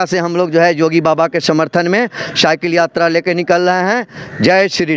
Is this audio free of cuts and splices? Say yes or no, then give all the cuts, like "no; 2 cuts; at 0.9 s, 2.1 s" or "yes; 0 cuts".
yes; 0 cuts